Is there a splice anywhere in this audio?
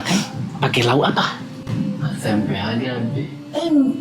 yes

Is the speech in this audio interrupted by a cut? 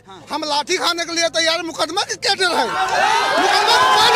no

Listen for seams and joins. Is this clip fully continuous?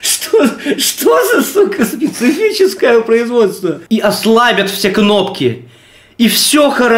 no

